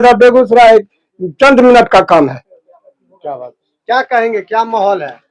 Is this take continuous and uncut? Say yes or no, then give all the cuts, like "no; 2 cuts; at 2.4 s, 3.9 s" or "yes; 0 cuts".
yes; 0 cuts